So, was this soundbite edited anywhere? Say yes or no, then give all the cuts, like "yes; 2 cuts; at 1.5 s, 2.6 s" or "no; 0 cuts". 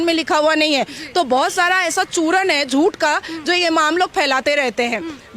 no; 0 cuts